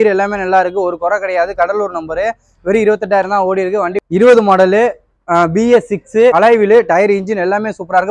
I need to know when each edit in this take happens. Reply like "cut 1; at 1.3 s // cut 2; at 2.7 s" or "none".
cut 1; at 4.0 s // cut 2; at 6.3 s